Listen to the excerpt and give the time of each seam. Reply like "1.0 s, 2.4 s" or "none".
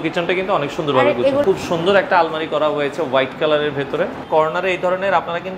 1.4 s, 4.2 s